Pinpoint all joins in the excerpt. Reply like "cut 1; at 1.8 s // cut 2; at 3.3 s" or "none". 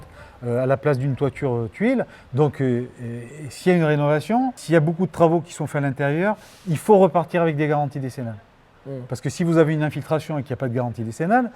cut 1; at 4.6 s